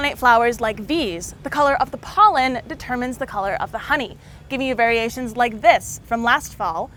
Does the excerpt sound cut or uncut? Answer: uncut